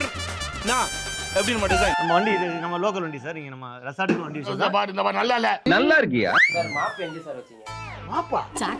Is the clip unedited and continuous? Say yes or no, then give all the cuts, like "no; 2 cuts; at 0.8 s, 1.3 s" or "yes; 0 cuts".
no; 1 cut; at 6.5 s